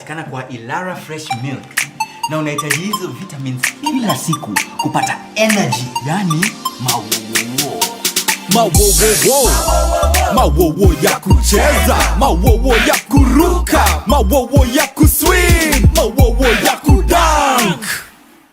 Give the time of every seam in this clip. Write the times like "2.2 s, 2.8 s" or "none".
15.6 s, 17.2 s